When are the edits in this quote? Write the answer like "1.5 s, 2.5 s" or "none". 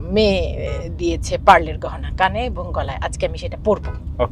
none